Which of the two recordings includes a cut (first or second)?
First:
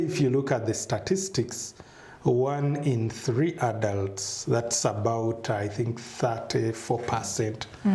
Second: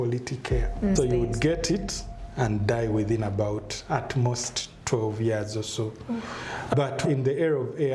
second